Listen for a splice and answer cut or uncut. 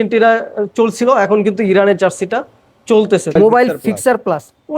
cut